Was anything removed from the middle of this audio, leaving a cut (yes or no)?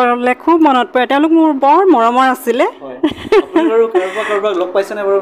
no